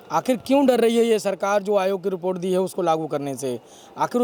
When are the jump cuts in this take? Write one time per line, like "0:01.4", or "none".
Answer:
none